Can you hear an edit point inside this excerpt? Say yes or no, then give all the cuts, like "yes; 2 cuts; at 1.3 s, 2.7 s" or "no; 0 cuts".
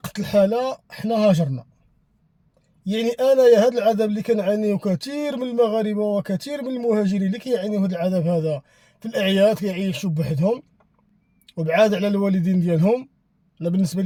no; 0 cuts